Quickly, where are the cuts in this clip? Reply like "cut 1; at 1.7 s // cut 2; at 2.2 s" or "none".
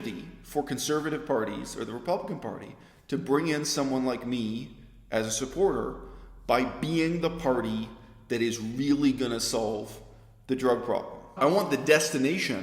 cut 1; at 11.3 s